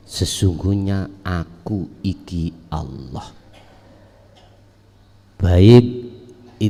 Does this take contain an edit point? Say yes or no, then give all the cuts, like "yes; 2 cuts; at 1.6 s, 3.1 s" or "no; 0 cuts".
no; 0 cuts